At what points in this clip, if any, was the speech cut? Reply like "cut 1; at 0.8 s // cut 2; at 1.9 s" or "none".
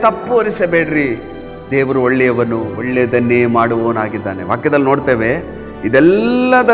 cut 1; at 2.8 s